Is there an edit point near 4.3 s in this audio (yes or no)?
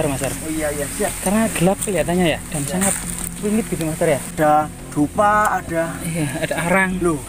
yes